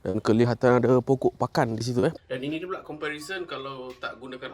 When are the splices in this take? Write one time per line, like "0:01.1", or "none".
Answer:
0:02.1